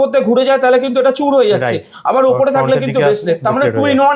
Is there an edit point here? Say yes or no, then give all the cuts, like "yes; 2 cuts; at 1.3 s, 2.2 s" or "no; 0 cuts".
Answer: no; 0 cuts